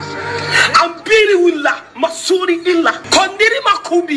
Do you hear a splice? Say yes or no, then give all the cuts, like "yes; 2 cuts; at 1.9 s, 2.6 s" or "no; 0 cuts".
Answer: yes; 1 cut; at 3.0 s